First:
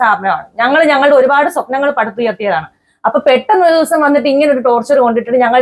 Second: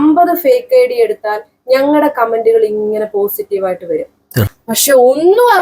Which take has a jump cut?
second; 1 cut; at 4.5 s

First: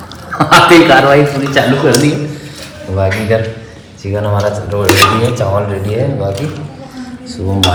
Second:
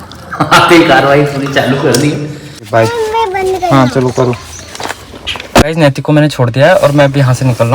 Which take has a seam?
second; 2 cuts; at 2.6 s, 5.6 s

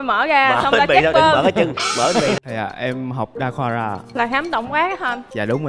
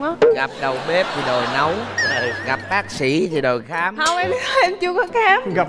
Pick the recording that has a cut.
first; 1 cut; at 2.4 s

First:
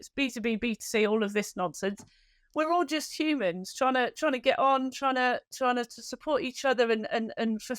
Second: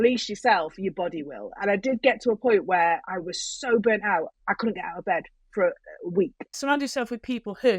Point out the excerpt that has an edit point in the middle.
second; 2 cuts; at 4.3 s, 6.6 s

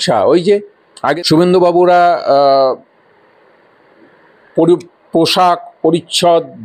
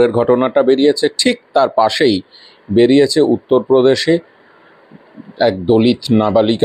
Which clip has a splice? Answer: first; 1 cut; at 1.2 s

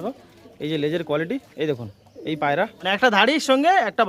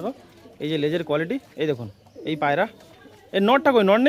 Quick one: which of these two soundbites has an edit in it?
first; 1 cut; at 2.8 s

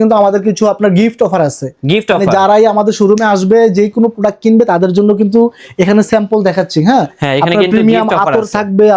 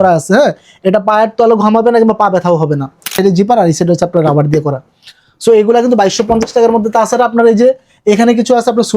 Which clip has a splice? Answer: second; 1 cut; at 3.1 s

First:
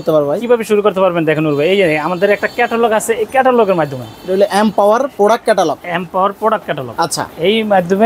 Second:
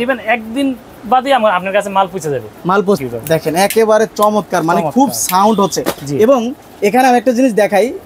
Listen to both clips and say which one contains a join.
second; 1 cut; at 3.0 s

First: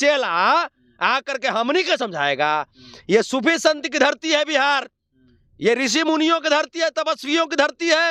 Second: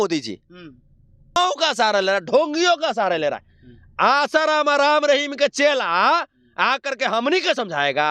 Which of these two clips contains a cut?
second; 1 cut; at 1.4 s

